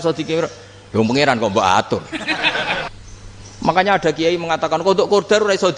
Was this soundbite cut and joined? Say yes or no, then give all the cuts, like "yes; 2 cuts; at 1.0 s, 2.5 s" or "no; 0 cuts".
yes; 1 cut; at 2.9 s